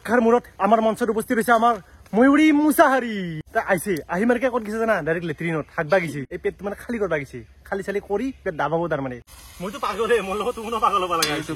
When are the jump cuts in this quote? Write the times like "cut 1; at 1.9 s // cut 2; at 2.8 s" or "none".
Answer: cut 1; at 3.4 s // cut 2; at 6.3 s // cut 3; at 9.3 s